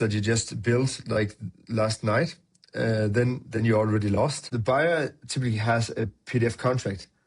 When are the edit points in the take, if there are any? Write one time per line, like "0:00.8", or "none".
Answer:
0:04.5